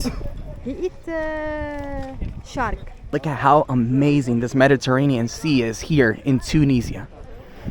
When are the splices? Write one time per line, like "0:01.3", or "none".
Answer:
0:03.1

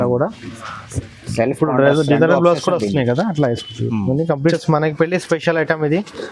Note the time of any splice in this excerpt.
0:04.5

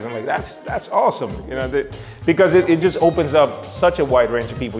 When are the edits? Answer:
none

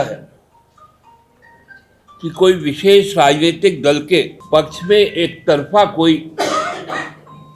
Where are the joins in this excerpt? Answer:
0:04.4

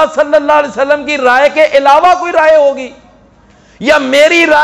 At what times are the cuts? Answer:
none

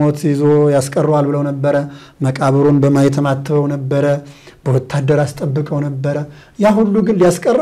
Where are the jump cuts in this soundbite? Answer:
none

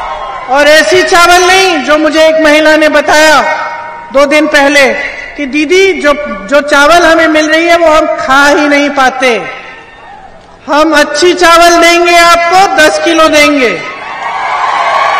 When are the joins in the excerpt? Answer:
none

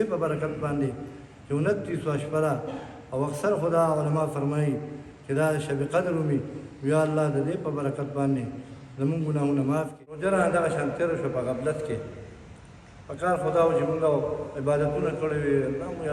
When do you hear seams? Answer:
0:10.2

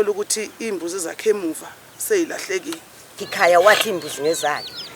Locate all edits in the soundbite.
0:03.2

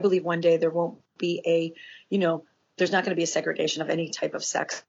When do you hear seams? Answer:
none

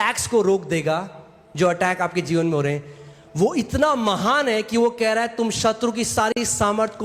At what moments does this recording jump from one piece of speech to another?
none

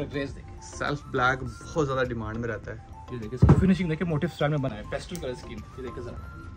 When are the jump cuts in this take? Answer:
0:04.7

